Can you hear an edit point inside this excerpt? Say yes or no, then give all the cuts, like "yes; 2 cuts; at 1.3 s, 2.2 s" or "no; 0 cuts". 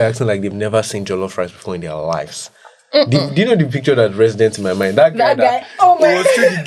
no; 0 cuts